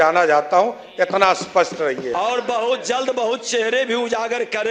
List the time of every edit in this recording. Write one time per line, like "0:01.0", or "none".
0:02.1